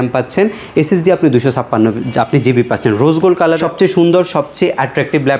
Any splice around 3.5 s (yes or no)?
yes